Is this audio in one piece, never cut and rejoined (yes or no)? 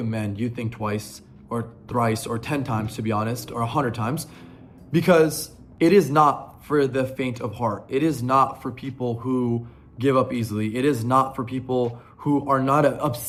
yes